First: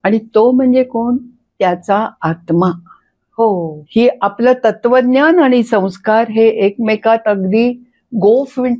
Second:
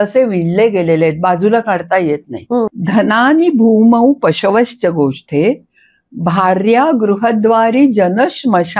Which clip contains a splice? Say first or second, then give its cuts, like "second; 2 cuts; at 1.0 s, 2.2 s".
second; 1 cut; at 2.7 s